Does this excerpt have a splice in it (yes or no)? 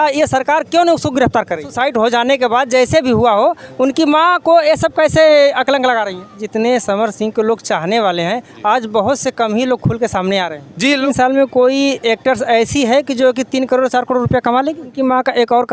yes